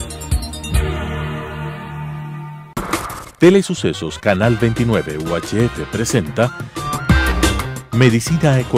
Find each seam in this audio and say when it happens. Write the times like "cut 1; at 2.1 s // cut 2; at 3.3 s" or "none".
none

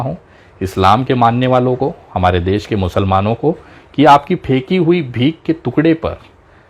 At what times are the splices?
none

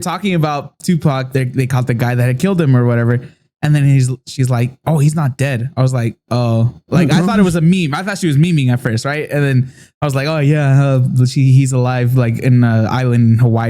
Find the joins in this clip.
cut 1; at 1.2 s

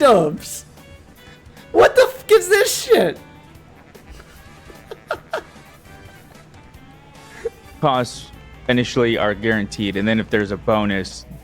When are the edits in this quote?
cut 1; at 7.8 s

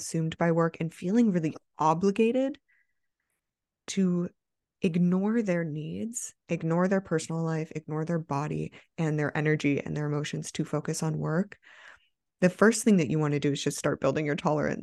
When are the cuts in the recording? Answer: cut 1; at 7.8 s

